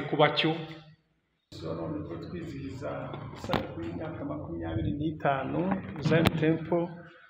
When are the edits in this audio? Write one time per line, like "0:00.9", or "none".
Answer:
0:01.5